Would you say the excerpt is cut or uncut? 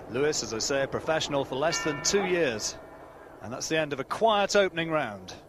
cut